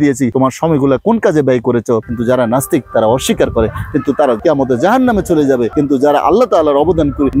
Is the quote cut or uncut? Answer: cut